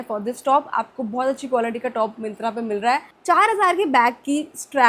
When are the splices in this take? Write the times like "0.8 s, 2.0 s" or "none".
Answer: 3.1 s